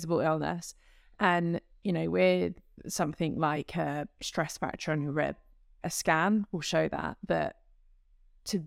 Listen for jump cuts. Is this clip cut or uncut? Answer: uncut